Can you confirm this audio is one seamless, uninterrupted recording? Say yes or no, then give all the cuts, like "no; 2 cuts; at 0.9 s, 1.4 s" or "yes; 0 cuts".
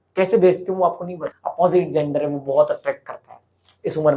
no; 1 cut; at 1.3 s